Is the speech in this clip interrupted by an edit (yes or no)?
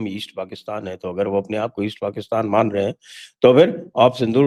no